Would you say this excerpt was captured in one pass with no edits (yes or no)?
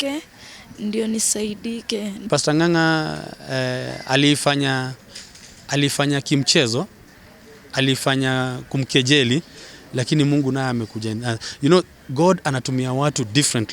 no